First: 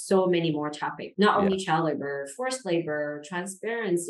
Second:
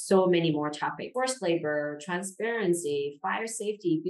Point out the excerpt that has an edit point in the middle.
second; 1 cut; at 1.0 s

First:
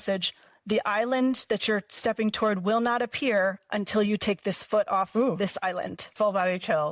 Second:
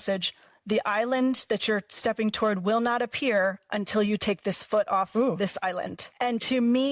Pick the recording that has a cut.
second; 1 cut; at 6.0 s

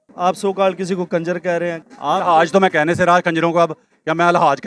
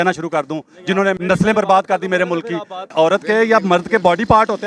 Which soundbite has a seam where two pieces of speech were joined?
second; 2 cuts; at 1.2 s, 2.9 s

